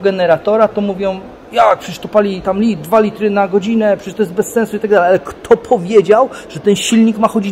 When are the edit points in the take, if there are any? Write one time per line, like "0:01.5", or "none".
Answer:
none